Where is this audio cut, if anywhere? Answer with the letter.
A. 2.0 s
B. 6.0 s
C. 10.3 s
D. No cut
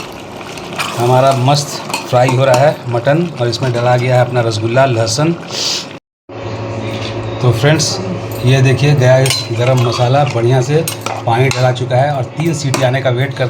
B